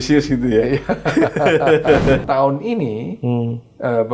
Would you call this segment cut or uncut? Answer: cut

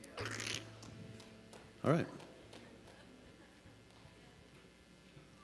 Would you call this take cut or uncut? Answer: uncut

